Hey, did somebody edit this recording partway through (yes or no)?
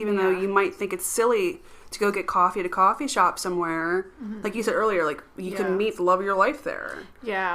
no